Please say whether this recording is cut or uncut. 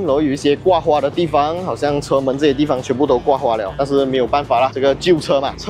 uncut